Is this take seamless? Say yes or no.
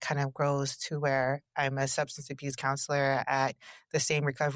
yes